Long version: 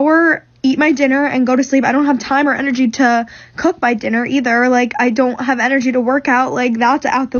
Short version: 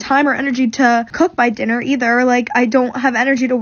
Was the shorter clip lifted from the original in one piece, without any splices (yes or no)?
no